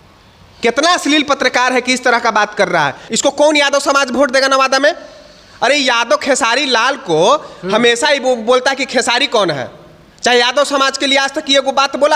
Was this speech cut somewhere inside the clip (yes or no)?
yes